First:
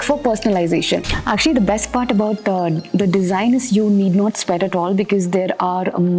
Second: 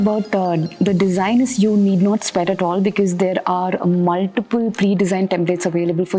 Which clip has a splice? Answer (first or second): first